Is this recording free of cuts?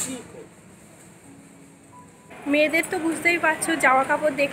no; 1 cut; at 2.3 s

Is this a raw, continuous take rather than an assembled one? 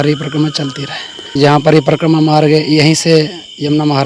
no; 1 cut; at 1.3 s

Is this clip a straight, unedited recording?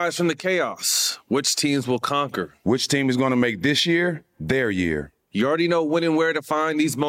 no; 1 cut; at 2.5 s

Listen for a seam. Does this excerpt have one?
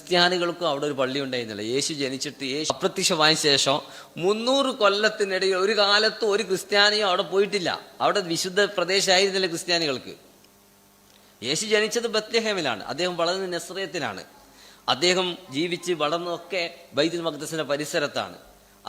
yes; 1 cut; at 2.7 s

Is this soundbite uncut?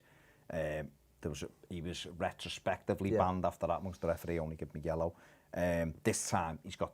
no; 1 cut; at 2.5 s

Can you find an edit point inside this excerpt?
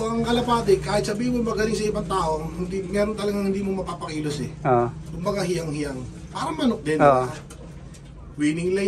no; 0 cuts

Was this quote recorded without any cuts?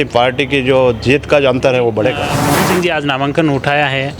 no; 1 cut; at 2.3 s

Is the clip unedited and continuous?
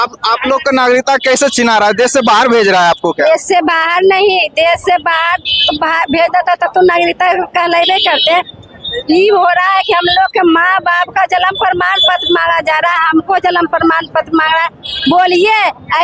yes; 0 cuts

